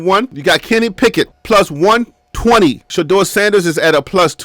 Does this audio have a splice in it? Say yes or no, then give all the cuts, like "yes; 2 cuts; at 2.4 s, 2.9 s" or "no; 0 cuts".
yes; 1 cut; at 2.9 s